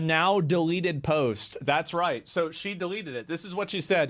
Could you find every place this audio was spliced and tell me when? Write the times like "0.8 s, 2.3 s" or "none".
2.2 s